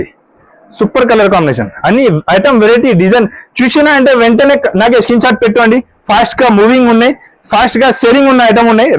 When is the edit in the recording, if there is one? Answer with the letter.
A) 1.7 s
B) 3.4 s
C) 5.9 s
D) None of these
D